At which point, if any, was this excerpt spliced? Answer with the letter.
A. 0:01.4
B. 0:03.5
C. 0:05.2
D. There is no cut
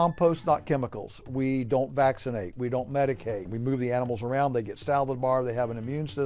B